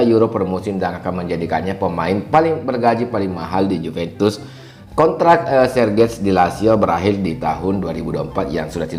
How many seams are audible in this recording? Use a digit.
1